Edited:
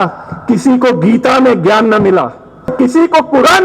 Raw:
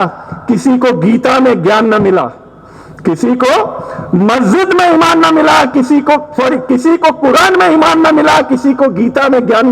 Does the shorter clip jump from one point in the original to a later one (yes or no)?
yes